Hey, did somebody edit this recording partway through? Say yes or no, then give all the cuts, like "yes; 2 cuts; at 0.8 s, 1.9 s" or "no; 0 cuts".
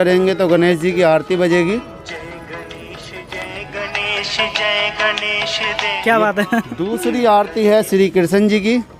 no; 0 cuts